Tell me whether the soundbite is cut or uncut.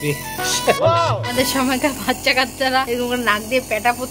cut